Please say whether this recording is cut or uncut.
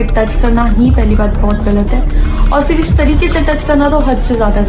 uncut